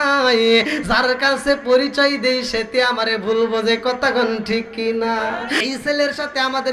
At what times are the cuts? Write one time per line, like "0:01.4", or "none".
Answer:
0:05.6